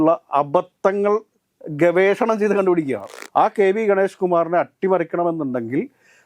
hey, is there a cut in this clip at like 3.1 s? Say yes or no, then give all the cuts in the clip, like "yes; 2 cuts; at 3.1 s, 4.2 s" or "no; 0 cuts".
yes; 1 cut; at 3.1 s